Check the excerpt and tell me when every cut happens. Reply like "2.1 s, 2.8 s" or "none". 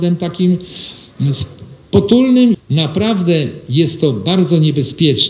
2.6 s